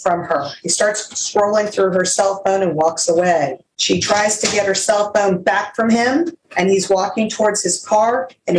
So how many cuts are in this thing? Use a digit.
2